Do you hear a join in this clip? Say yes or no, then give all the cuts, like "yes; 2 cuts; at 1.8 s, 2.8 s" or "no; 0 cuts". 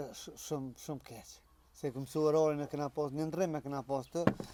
no; 0 cuts